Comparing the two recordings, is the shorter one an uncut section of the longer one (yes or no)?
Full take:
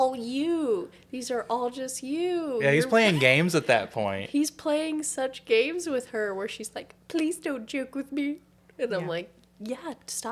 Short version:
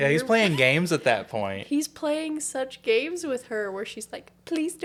yes